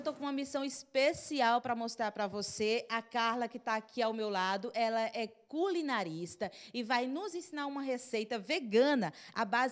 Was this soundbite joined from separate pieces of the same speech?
no; 0 cuts

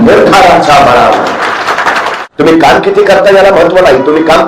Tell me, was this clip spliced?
yes; 1 cut; at 2.1 s

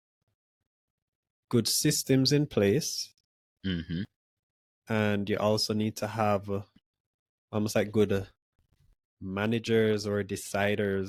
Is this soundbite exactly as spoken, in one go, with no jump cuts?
yes; 0 cuts

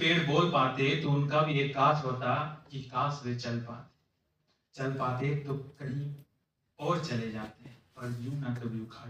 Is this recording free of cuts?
yes; 0 cuts

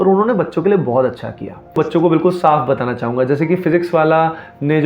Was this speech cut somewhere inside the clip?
yes; 1 cut; at 1.8 s

